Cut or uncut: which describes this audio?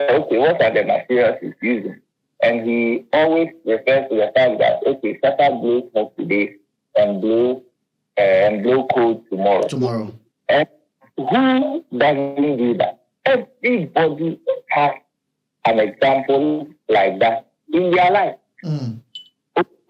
uncut